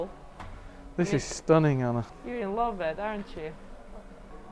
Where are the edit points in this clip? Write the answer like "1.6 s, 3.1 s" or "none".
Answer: 2.2 s